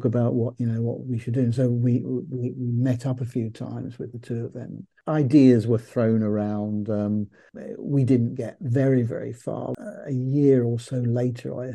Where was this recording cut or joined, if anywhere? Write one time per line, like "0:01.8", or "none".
0:04.9
0:09.7